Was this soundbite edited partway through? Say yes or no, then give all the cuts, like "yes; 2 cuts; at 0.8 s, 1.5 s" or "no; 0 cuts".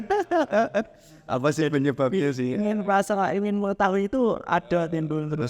no; 0 cuts